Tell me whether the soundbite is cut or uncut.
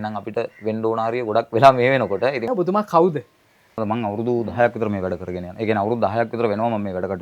cut